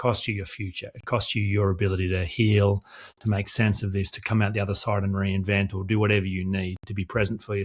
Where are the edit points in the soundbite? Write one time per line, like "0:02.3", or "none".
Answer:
none